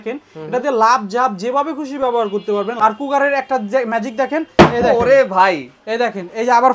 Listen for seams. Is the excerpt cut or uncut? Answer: cut